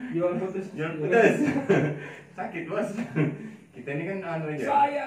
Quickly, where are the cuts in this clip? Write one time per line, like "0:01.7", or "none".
none